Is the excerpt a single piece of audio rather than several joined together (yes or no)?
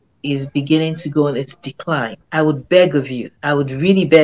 yes